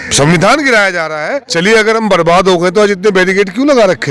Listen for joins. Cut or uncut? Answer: cut